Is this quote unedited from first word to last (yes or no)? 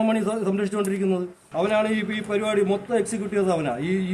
no